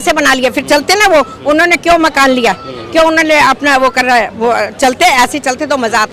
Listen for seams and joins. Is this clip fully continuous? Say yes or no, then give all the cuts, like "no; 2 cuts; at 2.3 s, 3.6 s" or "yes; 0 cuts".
yes; 0 cuts